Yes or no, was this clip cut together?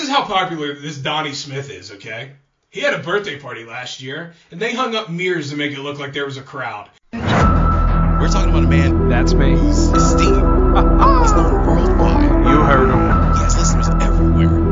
yes